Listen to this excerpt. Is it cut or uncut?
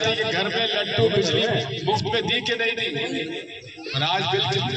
cut